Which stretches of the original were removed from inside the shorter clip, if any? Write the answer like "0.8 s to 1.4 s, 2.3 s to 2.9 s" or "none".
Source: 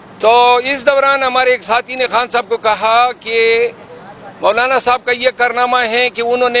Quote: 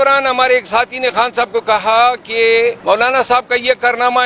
3.8 s to 4.4 s